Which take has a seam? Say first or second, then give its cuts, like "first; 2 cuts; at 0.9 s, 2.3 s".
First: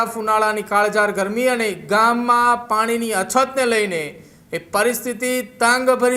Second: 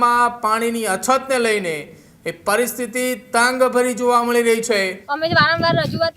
second; 1 cut; at 5.0 s